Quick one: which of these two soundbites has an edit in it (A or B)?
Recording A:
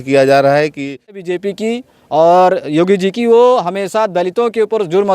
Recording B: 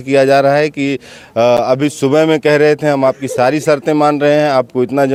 A